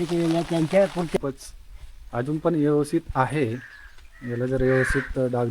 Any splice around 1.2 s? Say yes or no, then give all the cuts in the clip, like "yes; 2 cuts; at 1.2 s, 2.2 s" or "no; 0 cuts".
yes; 1 cut; at 1.2 s